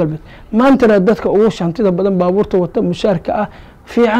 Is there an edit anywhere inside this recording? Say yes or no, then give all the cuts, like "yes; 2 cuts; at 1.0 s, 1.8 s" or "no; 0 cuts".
no; 0 cuts